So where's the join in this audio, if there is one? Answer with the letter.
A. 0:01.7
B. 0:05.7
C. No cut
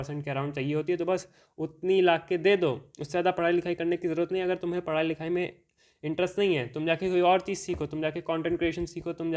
C